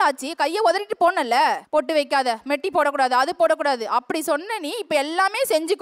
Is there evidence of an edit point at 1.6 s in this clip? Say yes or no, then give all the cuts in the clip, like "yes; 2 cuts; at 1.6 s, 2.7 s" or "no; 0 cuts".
yes; 1 cut; at 1.6 s